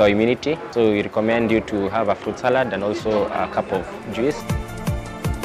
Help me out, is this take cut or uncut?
cut